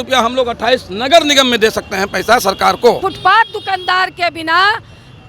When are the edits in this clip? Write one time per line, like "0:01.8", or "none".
0:03.0